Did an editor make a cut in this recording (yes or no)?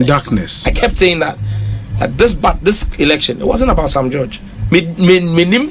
no